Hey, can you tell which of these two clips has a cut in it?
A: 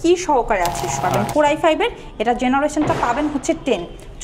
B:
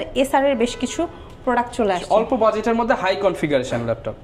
A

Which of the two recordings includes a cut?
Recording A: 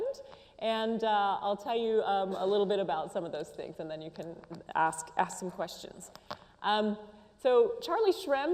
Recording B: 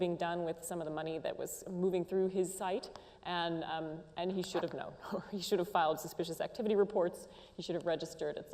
B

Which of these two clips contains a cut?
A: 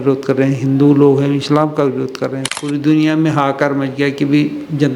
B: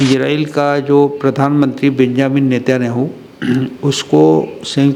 A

